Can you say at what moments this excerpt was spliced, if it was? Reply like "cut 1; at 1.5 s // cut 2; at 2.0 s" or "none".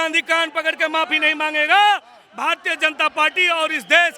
none